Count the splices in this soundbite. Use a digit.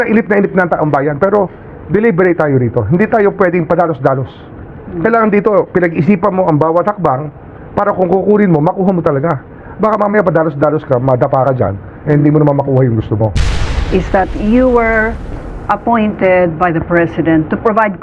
1